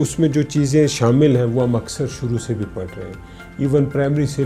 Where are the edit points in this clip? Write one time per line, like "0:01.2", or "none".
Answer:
none